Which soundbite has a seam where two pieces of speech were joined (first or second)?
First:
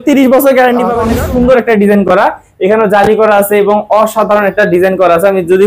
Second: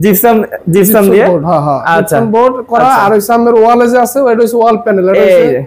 first